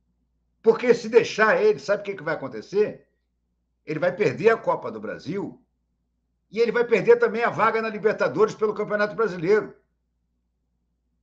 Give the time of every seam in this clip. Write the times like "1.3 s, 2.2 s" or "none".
none